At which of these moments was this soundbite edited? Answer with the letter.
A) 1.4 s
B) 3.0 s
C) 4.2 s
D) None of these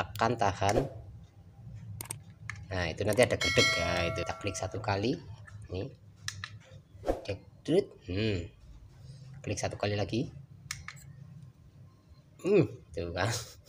C